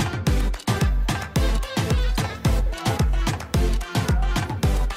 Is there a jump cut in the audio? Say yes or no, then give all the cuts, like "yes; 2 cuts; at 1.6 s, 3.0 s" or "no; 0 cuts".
no; 0 cuts